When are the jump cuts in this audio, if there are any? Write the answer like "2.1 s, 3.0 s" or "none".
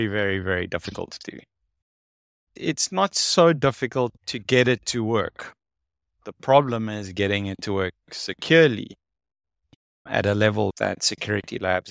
2.5 s, 4.2 s, 10.7 s